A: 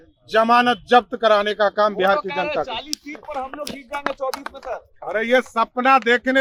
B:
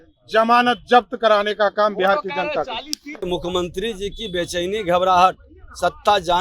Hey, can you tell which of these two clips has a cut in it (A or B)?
B